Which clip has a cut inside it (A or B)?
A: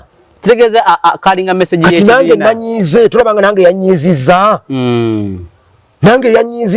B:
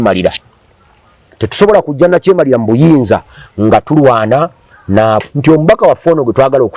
B